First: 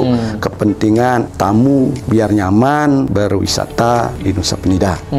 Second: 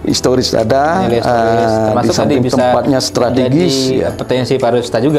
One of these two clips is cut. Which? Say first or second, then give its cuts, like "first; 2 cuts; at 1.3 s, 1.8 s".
first; 4 cuts; at 1.3 s, 2.0 s, 3.1 s, 4.1 s